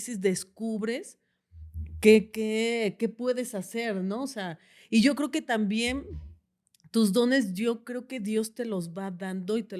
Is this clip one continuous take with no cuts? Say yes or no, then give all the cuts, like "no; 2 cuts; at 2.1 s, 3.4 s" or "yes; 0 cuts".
yes; 0 cuts